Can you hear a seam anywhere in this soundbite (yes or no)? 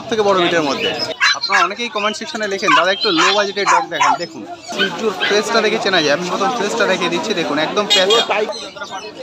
yes